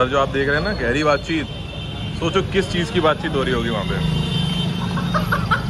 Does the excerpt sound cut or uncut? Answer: uncut